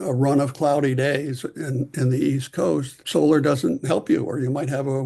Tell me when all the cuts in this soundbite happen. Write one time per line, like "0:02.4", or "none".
none